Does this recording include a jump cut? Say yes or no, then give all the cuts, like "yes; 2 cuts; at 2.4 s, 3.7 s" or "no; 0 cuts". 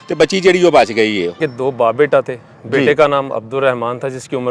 yes; 1 cut; at 1.4 s